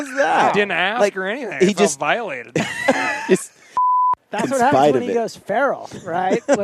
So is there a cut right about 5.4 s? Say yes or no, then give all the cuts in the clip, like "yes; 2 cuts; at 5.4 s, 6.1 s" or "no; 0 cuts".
no; 1 cut; at 3.9 s